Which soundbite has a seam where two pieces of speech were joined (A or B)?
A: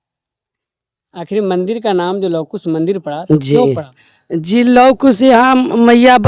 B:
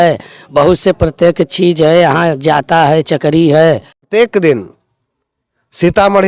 B